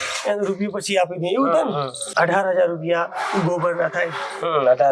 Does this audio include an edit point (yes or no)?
yes